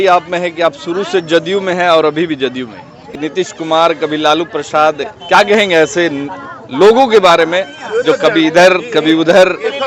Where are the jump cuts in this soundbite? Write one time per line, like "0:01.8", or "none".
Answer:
0:03.2